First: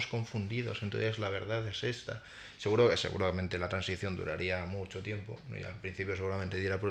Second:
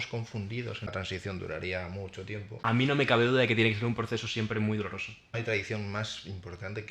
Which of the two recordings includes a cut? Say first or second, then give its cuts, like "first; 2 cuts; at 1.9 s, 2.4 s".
second; 3 cuts; at 0.9 s, 2.5 s, 5.3 s